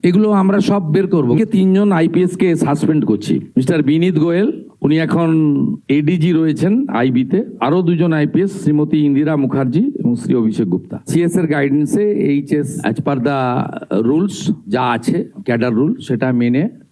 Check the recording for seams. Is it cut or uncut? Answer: cut